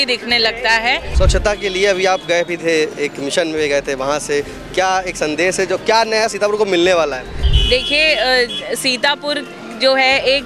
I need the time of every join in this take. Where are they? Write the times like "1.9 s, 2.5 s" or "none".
1.1 s, 7.5 s